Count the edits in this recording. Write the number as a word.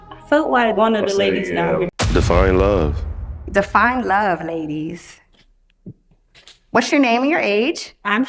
one